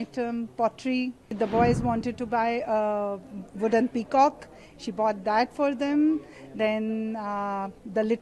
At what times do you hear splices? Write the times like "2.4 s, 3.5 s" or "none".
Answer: 1.3 s